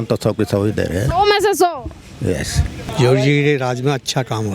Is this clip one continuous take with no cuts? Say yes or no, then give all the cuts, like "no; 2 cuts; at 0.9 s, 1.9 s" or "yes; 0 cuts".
no; 1 cut; at 2.8 s